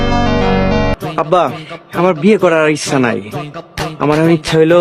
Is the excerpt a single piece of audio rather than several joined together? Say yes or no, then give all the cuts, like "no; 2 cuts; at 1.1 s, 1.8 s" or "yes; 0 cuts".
no; 1 cut; at 1.0 s